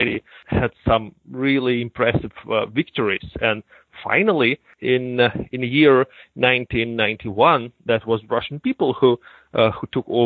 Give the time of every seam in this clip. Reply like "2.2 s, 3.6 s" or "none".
none